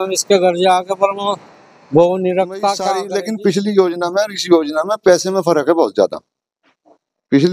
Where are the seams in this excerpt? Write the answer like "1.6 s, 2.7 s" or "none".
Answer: 3.0 s